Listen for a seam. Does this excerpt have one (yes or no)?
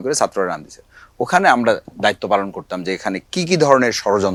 no